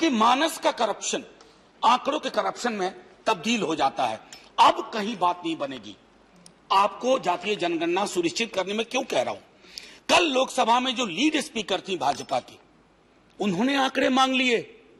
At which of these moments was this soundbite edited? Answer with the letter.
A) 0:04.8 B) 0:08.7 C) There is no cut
C